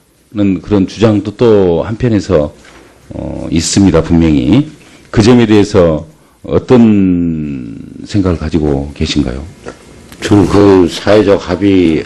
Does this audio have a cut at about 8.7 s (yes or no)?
yes